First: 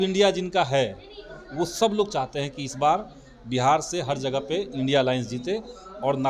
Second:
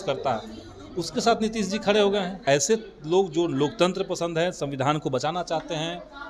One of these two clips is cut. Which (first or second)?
second